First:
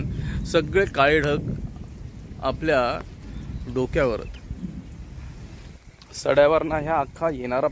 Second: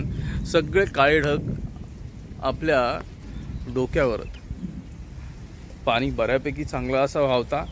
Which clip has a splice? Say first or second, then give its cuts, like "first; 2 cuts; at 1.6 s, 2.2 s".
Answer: first; 1 cut; at 5.6 s